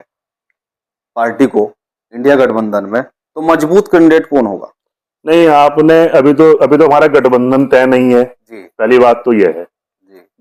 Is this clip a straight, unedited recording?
yes; 0 cuts

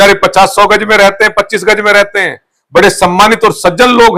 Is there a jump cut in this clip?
no; 0 cuts

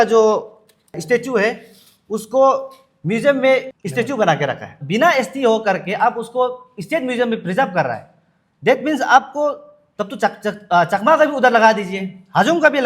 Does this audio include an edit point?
yes; 3 cuts; at 1.0 s, 3.7 s, 4.8 s

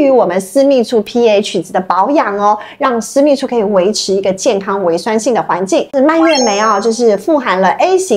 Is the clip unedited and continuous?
yes; 0 cuts

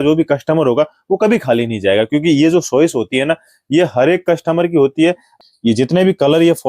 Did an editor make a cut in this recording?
yes; 1 cut; at 5.3 s

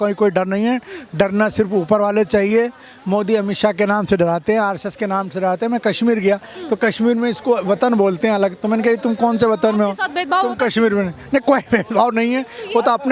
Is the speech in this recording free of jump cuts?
yes; 0 cuts

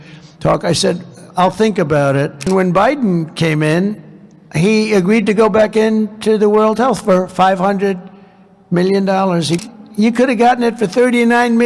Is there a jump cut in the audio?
yes; 2 cuts; at 2.5 s, 9.6 s

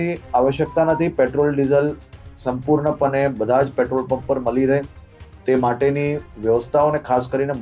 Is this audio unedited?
yes; 0 cuts

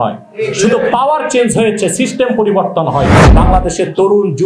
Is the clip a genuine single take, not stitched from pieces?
no; 1 cut; at 3.2 s

